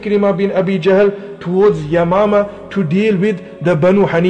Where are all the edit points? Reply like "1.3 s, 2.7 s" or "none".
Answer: 1.3 s